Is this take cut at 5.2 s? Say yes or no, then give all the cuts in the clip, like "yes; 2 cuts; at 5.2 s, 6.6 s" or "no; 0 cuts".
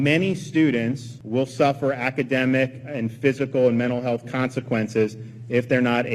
no; 1 cut; at 1.1 s